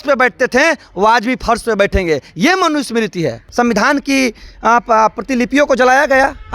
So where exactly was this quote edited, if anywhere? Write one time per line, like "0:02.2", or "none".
0:03.4